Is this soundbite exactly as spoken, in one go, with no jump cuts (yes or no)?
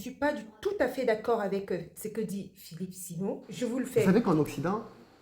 no